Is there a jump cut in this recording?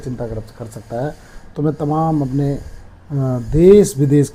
no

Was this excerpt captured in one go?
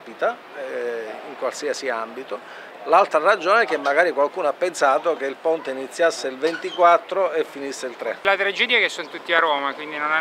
no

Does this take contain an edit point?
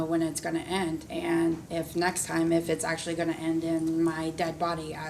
yes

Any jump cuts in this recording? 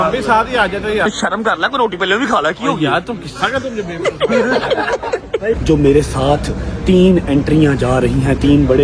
yes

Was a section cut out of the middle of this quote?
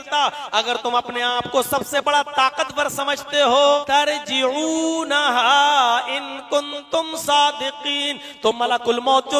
yes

